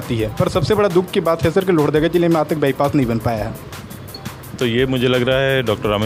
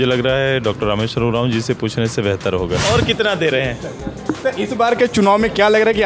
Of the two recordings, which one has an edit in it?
second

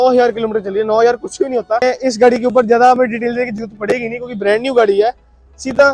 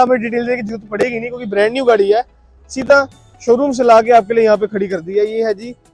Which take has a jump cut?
first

